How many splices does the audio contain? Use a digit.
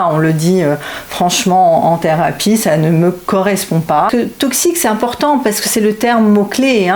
1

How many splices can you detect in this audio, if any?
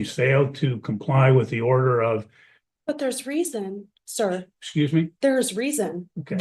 0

